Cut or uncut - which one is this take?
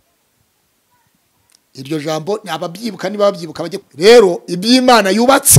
cut